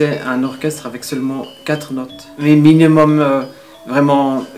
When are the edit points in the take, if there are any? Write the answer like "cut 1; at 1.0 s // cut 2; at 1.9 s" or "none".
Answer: cut 1; at 2.2 s